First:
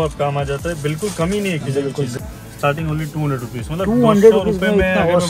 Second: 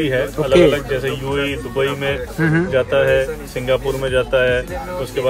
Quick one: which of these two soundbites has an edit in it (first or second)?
first